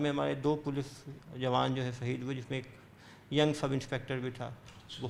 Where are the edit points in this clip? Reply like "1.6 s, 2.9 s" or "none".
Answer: none